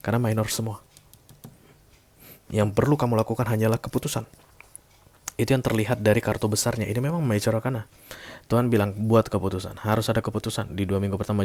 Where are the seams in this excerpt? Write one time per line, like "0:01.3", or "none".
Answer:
none